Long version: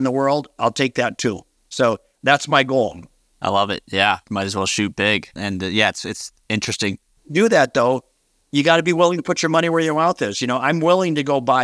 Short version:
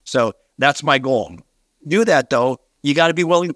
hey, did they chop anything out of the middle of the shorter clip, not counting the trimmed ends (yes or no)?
yes